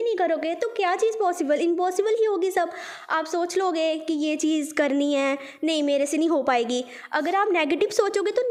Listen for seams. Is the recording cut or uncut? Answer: uncut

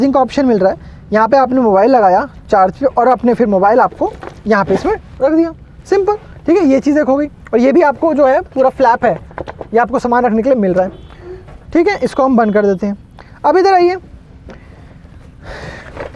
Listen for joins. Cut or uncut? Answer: uncut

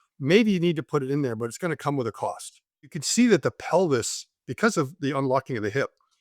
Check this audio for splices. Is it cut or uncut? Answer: cut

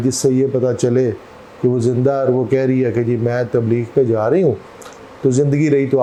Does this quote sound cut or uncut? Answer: uncut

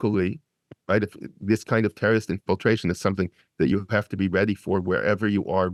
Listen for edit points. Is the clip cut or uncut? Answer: uncut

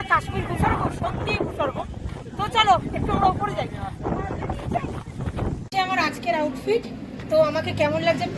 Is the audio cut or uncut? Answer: cut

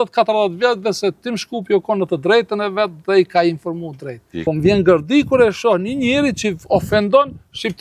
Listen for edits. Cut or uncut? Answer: cut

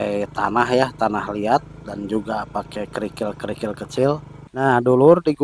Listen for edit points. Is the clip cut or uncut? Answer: cut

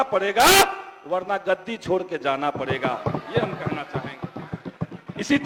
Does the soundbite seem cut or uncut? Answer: uncut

